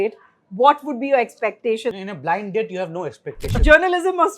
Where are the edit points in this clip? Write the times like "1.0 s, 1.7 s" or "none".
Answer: 1.9 s, 3.6 s

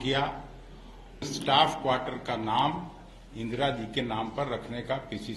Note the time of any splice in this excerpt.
1.3 s

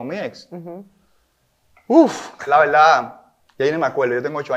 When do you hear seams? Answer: 2.3 s

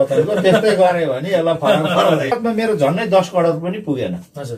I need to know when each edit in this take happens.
2.4 s

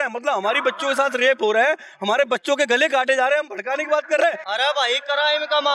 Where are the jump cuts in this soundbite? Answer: none

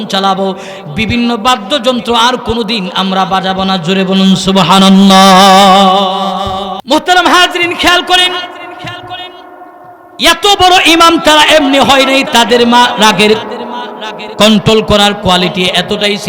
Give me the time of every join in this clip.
6.7 s

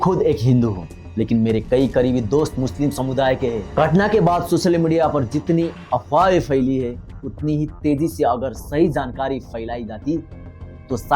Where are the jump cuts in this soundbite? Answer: 3.6 s

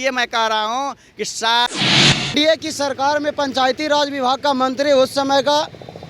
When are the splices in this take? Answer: 2.3 s

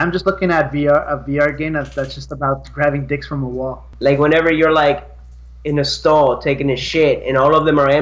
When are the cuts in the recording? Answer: 3.9 s

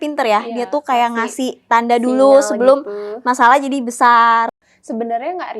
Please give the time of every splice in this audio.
4.6 s

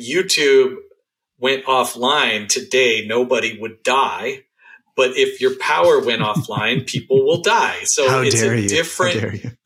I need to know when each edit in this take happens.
none

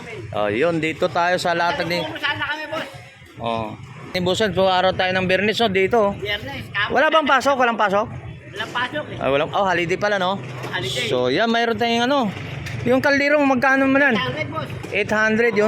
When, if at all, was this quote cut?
4.1 s

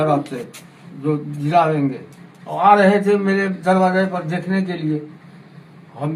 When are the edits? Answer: none

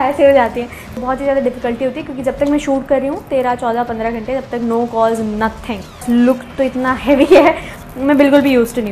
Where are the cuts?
1.0 s, 6.0 s

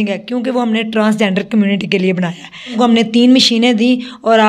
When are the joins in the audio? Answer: 2.7 s

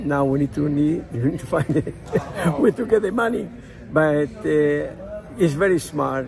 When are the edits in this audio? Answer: none

